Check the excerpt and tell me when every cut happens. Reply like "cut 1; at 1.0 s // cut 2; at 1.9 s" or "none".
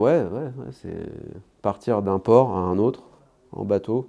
none